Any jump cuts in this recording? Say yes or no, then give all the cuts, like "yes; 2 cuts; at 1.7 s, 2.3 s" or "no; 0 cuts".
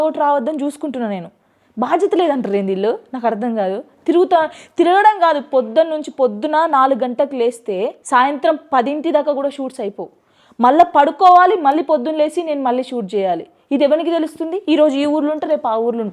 no; 0 cuts